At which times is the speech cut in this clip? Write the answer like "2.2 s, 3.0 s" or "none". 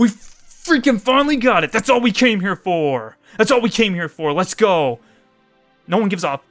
none